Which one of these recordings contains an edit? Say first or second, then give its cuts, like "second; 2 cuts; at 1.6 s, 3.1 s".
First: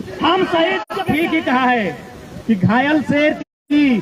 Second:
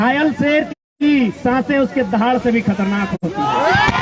first; 1 cut; at 0.9 s